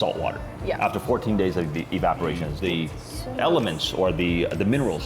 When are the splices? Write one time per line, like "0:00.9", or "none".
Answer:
0:02.5